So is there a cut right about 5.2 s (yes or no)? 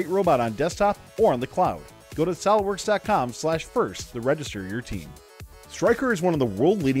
yes